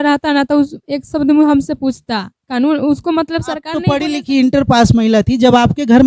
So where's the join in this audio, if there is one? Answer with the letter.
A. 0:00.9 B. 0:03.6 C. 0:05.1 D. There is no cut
B